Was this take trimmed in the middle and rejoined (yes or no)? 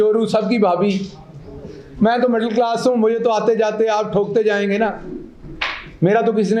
no